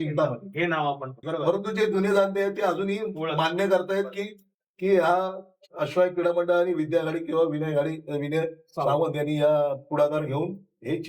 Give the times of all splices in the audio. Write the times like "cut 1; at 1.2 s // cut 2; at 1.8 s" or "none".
cut 1; at 1.1 s